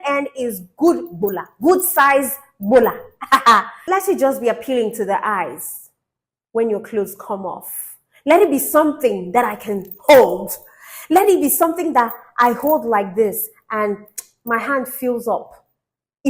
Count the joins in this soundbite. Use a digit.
1